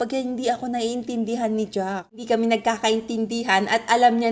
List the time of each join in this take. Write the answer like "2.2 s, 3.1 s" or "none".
2.2 s

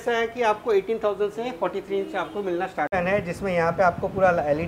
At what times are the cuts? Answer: 2.9 s

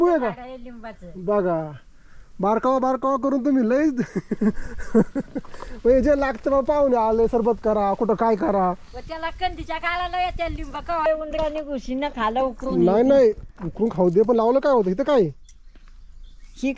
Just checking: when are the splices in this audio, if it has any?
11.1 s

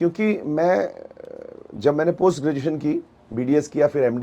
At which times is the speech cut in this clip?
none

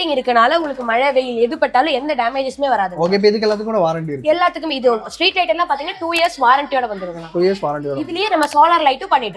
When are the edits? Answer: none

